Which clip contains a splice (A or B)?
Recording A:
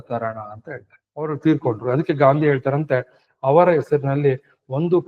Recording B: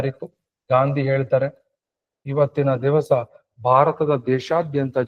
A